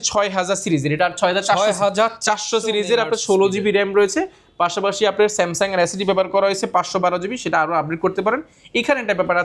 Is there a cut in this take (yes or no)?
no